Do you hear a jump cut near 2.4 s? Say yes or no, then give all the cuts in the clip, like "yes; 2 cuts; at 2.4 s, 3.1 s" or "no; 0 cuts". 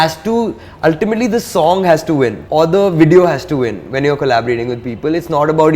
yes; 1 cut; at 2.4 s